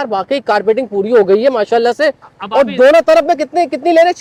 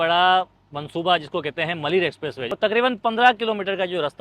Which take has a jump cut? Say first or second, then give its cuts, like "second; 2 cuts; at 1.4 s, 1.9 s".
second; 1 cut; at 2.5 s